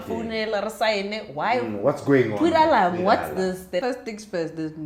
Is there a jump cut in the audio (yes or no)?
yes